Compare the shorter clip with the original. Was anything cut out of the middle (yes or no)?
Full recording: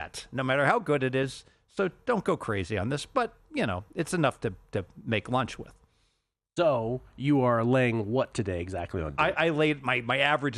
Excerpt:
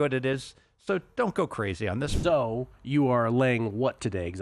yes